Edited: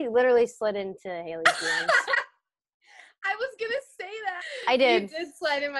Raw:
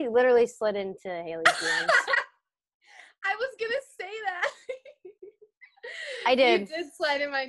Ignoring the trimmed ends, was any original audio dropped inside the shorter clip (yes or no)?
yes